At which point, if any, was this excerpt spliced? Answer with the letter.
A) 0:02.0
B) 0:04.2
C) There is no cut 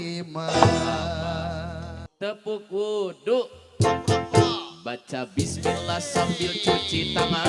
A